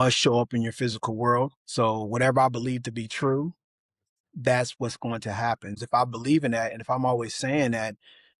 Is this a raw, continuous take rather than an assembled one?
no; 2 cuts; at 1.6 s, 5.8 s

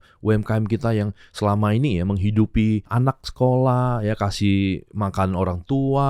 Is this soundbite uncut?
no; 1 cut; at 2.9 s

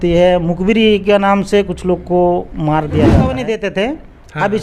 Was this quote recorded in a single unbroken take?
no; 1 cut; at 3.3 s

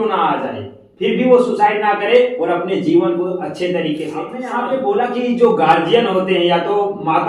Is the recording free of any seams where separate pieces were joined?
no; 1 cut; at 4.4 s

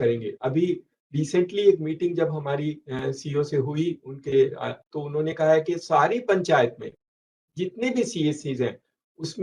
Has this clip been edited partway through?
no; 0 cuts

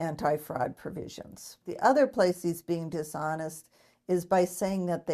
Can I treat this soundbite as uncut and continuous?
no; 1 cut; at 1.7 s

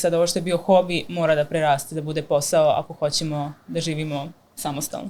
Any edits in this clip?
no; 0 cuts

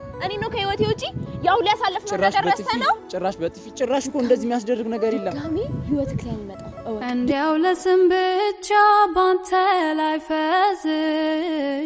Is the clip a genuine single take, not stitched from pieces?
yes; 0 cuts

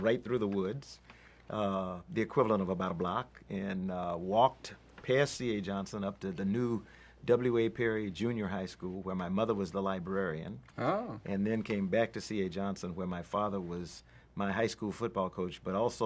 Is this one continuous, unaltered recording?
no; 1 cut; at 13.5 s

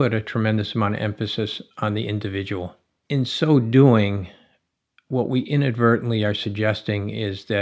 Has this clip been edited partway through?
yes; 1 cut; at 2.9 s

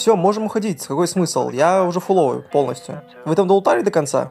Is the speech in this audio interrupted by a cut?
no; 0 cuts

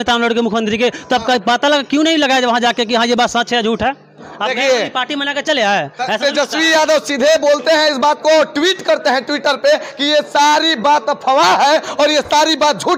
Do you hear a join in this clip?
no; 0 cuts

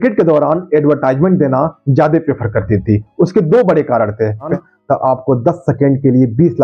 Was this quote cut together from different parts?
yes; 1 cut; at 4.5 s

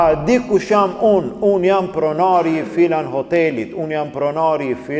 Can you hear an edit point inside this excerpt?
no; 0 cuts

